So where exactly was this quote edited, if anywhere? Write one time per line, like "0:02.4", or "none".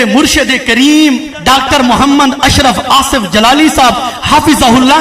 0:01.3